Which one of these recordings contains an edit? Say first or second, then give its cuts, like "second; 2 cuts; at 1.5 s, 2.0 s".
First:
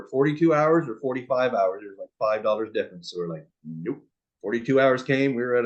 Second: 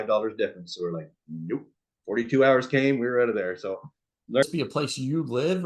second; 1 cut; at 4.4 s